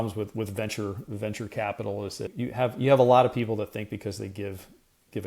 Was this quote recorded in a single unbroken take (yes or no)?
no